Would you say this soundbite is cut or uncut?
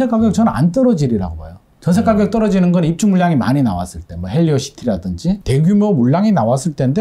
uncut